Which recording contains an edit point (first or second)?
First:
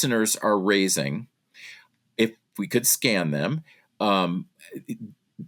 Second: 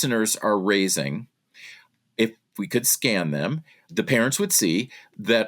second